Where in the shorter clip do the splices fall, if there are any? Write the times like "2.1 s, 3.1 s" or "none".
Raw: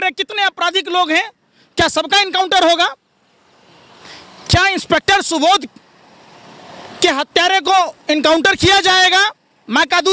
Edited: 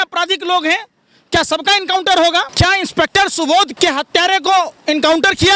2.5 s, 3.7 s